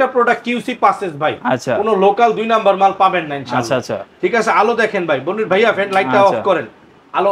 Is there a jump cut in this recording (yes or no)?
no